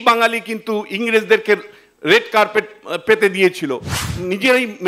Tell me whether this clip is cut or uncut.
cut